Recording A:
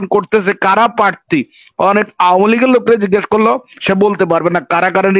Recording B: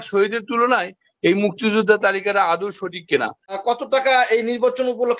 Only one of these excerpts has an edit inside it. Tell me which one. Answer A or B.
B